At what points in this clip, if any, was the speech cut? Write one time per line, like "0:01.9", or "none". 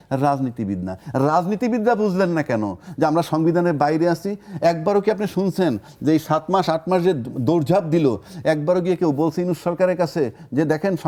none